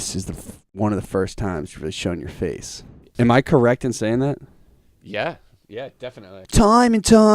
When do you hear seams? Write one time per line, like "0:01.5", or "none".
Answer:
0:03.0
0:06.4